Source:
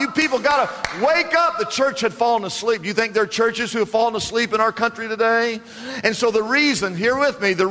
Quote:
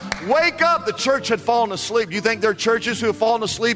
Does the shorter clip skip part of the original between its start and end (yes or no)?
no